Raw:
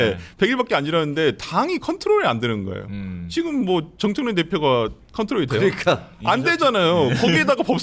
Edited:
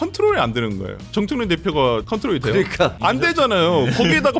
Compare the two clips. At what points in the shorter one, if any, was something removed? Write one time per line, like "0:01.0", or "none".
0:01.0
0:02.1
0:03.0